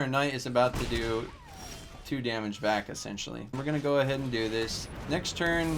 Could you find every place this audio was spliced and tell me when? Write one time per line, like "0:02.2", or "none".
0:03.6